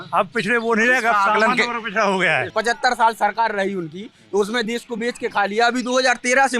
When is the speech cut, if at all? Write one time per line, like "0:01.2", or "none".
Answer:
0:02.5